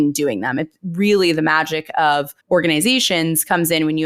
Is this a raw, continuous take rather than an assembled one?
no; 1 cut; at 2.3 s

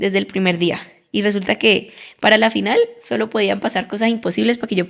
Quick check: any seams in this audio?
no; 0 cuts

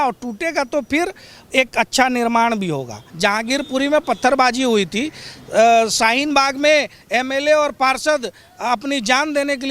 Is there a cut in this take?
yes; 1 cut; at 3.0 s

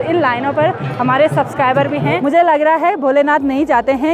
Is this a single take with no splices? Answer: no; 1 cut; at 2.2 s

